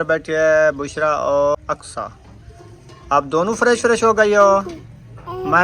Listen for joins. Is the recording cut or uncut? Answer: cut